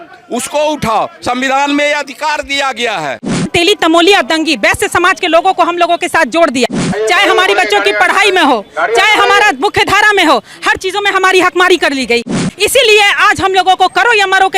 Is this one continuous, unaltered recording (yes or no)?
no